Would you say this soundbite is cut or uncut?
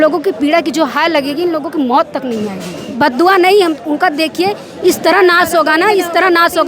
cut